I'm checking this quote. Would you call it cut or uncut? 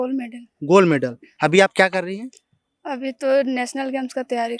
uncut